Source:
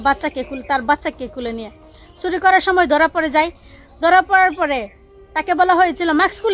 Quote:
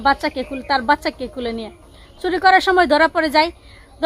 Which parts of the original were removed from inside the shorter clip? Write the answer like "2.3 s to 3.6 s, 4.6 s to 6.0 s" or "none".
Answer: none